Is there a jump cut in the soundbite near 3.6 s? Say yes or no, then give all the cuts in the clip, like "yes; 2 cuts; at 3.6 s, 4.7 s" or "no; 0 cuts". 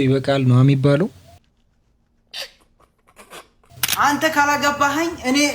yes; 1 cut; at 3.6 s